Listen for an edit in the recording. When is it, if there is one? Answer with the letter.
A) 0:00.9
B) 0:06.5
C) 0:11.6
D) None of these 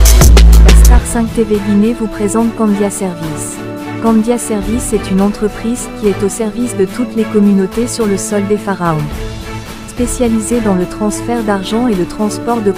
A